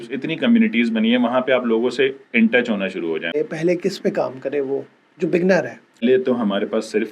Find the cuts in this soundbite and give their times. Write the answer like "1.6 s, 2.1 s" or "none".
3.3 s, 6.0 s